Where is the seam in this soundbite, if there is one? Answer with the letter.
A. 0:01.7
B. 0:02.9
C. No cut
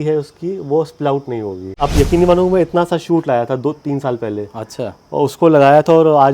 A